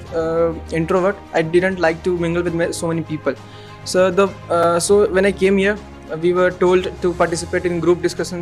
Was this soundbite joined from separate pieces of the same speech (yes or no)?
no